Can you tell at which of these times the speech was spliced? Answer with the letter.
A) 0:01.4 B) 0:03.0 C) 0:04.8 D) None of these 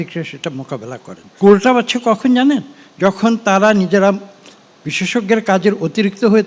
A